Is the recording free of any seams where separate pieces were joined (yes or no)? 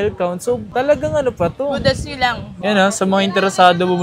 no